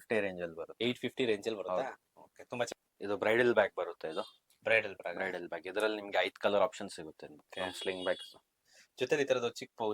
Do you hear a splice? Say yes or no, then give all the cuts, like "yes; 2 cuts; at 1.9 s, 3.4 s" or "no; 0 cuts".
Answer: yes; 1 cut; at 7.5 s